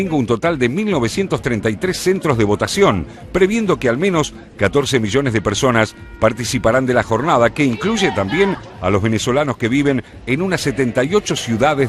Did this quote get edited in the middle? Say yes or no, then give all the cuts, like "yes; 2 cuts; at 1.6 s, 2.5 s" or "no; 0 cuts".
no; 0 cuts